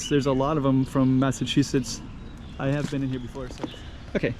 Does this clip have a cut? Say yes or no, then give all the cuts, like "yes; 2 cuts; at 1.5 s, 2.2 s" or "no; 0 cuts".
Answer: yes; 1 cut; at 3.4 s